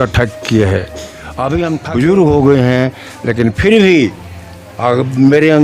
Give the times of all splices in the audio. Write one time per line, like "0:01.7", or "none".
0:01.8